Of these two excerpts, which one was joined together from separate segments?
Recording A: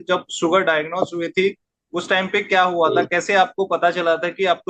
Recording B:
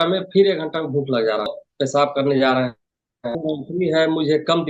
B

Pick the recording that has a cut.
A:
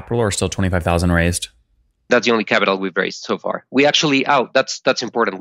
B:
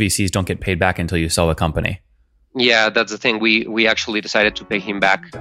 A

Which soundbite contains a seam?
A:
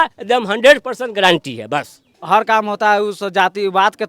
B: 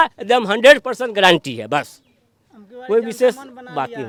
A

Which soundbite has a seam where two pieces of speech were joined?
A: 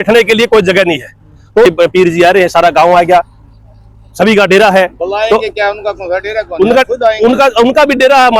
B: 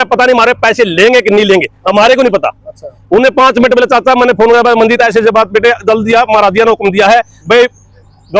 A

